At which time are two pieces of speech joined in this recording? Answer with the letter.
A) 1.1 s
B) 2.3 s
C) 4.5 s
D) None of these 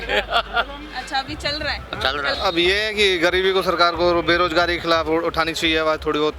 B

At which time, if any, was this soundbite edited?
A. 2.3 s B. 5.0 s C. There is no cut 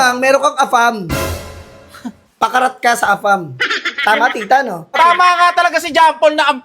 B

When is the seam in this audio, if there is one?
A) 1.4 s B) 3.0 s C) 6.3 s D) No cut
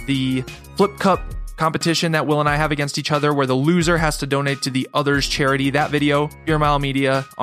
C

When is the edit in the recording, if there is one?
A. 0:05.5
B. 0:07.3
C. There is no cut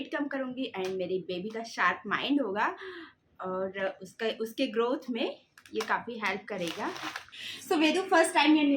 B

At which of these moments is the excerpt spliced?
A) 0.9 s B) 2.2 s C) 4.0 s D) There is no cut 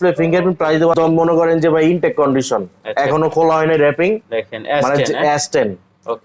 A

